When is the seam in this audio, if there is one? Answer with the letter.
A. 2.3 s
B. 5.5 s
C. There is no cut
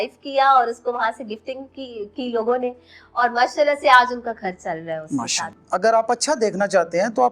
B